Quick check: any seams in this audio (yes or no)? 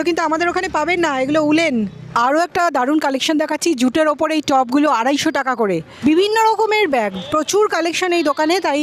yes